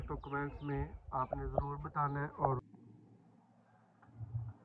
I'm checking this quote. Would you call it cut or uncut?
cut